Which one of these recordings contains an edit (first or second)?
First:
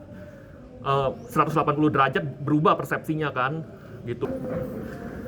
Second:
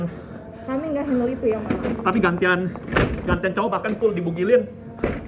first